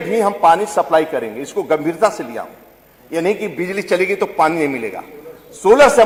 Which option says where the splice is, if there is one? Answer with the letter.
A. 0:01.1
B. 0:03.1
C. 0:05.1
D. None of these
D